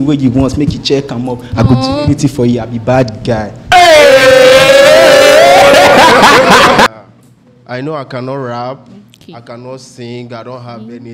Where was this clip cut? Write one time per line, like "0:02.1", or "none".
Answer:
0:06.9